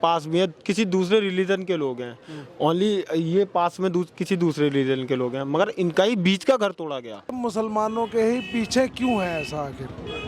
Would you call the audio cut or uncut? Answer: cut